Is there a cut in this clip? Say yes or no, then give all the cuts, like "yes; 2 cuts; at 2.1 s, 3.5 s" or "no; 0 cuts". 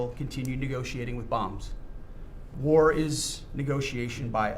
yes; 1 cut; at 2.5 s